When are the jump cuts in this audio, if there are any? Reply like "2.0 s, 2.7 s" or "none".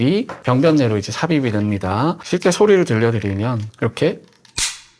2.2 s